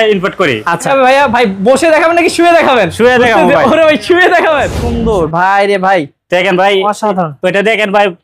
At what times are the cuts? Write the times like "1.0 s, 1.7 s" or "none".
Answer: 0.9 s, 4.9 s